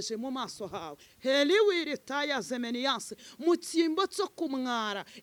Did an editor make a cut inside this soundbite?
no; 0 cuts

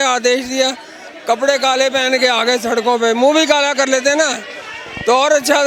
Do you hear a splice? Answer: no; 0 cuts

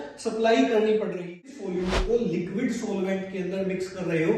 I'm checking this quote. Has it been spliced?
yes; 1 cut; at 1.5 s

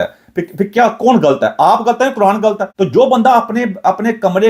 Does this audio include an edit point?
yes; 1 cut; at 2.7 s

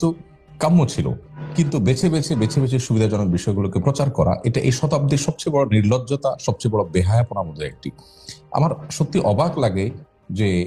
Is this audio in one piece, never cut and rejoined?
yes; 0 cuts

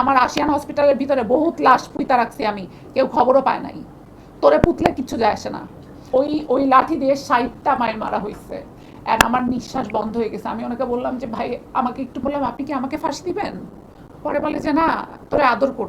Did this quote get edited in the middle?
yes; 2 cuts; at 6.0 s, 12.2 s

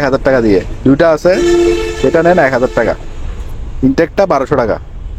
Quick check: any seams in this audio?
no; 0 cuts

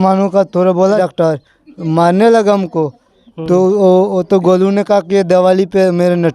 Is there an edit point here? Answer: yes; 1 cut; at 1.0 s

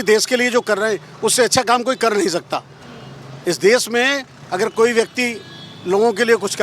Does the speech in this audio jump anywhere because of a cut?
no; 0 cuts

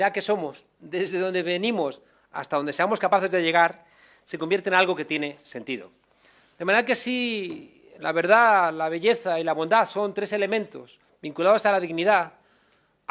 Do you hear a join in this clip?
yes; 1 cut; at 10.8 s

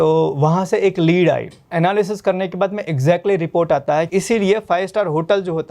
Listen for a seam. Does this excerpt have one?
yes; 2 cuts; at 1.7 s, 4.1 s

